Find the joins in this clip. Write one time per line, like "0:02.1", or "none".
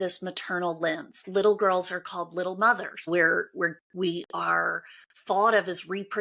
0:01.2
0:03.1